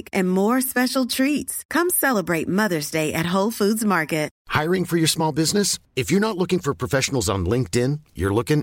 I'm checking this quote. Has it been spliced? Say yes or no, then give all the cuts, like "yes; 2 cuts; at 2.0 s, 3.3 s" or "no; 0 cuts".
yes; 1 cut; at 4.4 s